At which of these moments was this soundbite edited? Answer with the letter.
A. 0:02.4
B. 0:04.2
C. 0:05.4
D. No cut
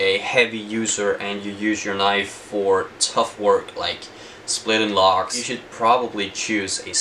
C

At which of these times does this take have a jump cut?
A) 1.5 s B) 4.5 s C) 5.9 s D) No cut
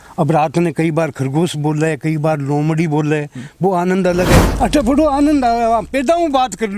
B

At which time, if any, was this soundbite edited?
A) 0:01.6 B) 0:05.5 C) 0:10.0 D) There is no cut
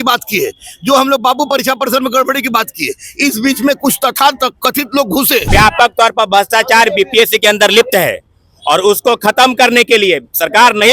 B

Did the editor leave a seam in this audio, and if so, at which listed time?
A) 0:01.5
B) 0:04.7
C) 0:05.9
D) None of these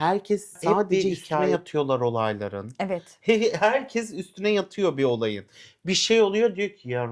A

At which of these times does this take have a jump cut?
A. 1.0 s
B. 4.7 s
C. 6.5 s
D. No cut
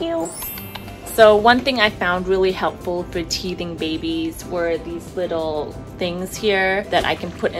A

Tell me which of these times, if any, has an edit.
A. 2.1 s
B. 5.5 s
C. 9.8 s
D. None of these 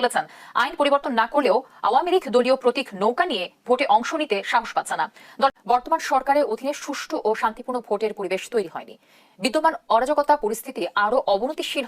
B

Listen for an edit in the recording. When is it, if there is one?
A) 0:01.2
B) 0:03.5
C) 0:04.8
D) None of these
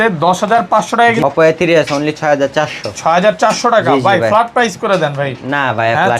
A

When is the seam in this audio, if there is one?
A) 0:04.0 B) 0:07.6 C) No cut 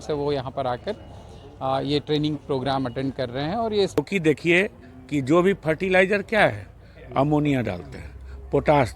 A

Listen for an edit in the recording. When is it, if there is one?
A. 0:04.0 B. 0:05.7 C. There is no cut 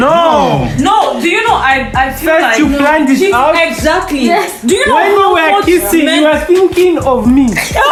C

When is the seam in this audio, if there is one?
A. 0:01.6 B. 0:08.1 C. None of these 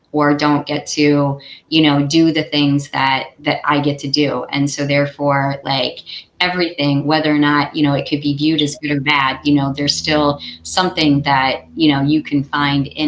C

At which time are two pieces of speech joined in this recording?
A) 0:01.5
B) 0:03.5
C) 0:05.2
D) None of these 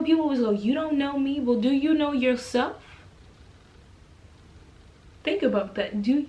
C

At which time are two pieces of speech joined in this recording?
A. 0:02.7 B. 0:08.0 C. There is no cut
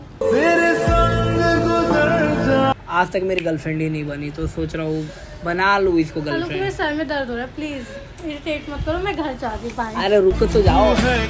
A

